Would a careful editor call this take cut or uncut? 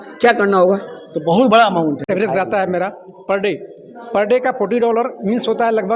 cut